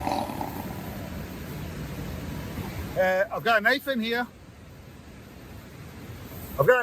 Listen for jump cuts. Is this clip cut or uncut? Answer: cut